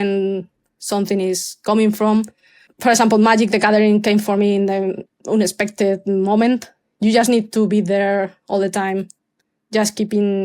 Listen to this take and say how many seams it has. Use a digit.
2